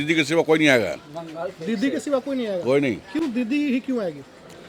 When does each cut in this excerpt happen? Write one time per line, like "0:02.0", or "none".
none